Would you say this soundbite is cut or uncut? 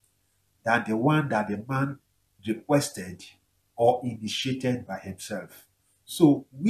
cut